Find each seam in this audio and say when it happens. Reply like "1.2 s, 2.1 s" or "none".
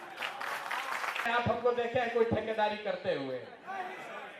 1.3 s